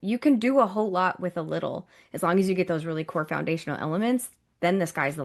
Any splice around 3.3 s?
no; 1 cut; at 2.0 s

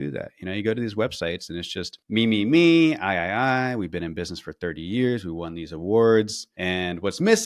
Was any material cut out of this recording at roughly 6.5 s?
no; 0 cuts

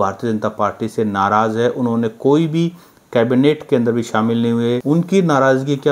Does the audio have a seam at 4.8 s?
yes; 1 cut; at 4.8 s

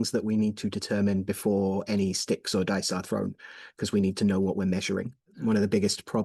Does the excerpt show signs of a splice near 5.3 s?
yes; 1 cut; at 5.3 s

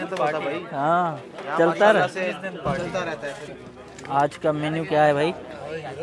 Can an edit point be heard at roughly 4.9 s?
no; 1 cut; at 3.4 s

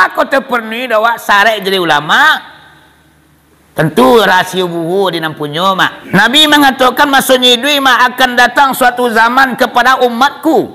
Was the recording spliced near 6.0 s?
yes; 1 cut; at 6.0 s

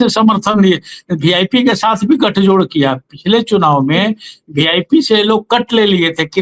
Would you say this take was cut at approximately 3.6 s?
no; 0 cuts

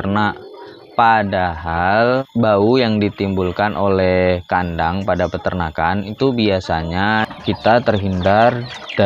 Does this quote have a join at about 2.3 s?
yes; 2 cuts; at 2.3 s, 7.3 s

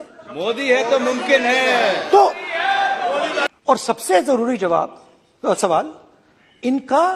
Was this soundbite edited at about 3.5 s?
yes; 1 cut; at 3.5 s

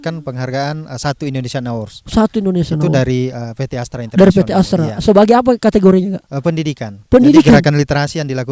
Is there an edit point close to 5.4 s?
no; 0 cuts

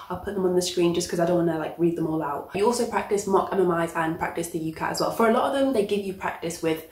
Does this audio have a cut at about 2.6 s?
yes; 1 cut; at 2.6 s

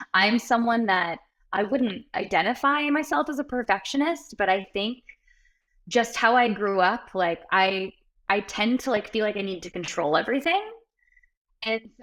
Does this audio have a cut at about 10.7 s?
no; 0 cuts

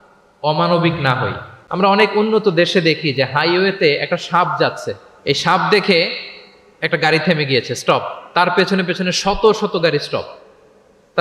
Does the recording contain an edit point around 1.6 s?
yes; 1 cut; at 1.6 s

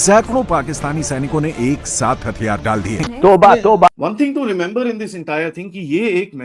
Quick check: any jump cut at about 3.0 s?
yes; 2 cuts; at 3.0 s, 3.9 s

